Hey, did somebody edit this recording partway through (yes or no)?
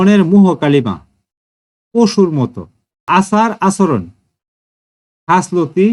yes